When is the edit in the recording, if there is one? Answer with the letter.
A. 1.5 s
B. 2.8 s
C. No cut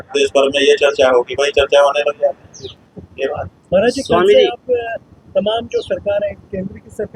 C